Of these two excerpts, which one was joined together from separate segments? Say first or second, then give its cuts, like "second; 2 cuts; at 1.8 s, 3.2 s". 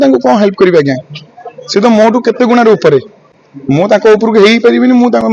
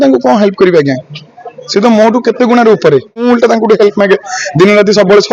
second; 1 cut; at 3.2 s